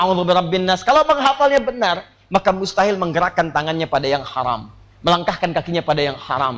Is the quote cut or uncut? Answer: uncut